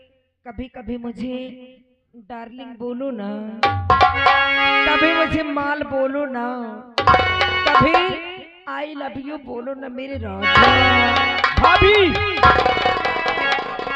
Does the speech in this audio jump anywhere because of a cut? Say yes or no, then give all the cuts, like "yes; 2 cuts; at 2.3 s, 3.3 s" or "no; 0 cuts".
no; 0 cuts